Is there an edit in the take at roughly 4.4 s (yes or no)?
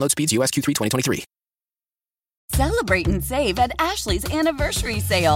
no